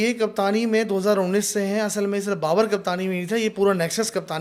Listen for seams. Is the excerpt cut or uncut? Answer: uncut